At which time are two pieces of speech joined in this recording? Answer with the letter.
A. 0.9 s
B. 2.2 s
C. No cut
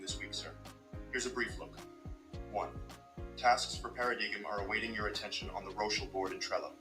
C